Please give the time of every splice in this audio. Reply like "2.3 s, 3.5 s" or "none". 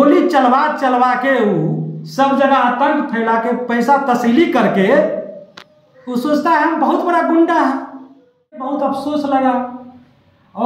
8.7 s